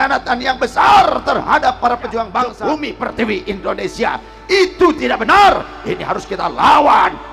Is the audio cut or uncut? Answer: cut